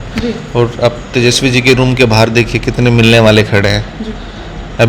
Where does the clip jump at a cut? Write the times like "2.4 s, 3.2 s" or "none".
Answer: none